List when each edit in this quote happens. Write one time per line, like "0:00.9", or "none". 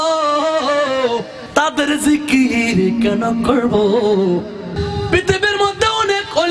0:01.4
0:04.8